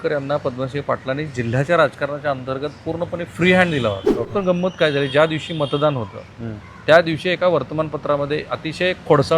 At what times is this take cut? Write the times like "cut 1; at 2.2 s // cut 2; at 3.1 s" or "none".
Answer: cut 1; at 4.3 s